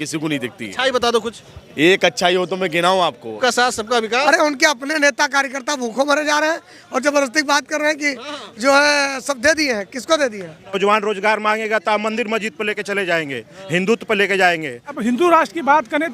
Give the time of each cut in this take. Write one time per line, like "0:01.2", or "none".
0:03.3
0:10.8
0:14.9